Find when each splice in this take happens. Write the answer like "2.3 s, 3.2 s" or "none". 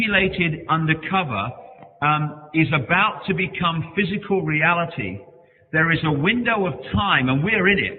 none